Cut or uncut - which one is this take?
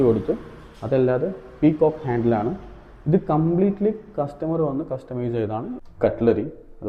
cut